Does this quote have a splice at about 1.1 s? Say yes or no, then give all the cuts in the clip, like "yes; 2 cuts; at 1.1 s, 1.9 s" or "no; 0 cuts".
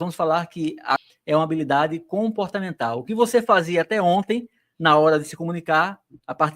yes; 1 cut; at 1.1 s